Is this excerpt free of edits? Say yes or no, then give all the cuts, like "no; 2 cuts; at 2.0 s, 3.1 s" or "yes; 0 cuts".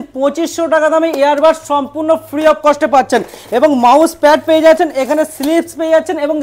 yes; 0 cuts